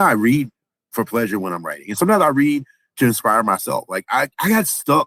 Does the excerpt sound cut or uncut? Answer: uncut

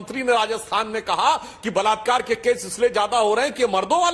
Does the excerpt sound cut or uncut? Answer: uncut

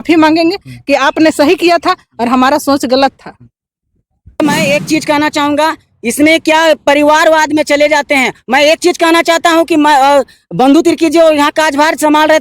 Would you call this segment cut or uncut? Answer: cut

